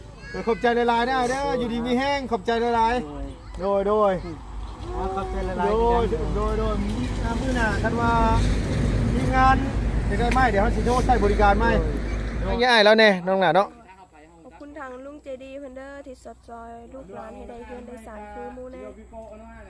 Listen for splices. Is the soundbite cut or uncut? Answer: cut